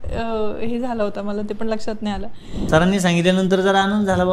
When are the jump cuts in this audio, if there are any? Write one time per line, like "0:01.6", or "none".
0:02.6